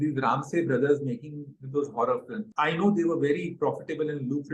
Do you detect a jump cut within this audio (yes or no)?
yes